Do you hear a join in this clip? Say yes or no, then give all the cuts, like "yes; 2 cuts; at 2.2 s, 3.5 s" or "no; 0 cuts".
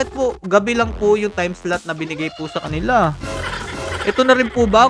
no; 0 cuts